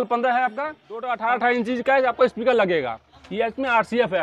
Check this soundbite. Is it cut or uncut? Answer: cut